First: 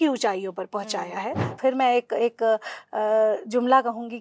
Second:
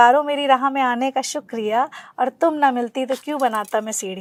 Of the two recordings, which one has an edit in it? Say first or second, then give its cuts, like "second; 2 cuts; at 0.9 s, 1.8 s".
first; 1 cut; at 1.5 s